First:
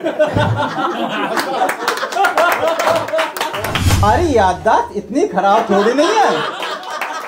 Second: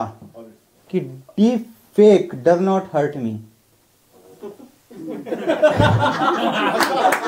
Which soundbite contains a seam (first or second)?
first